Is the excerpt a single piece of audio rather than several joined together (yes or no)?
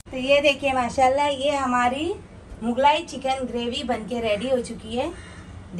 yes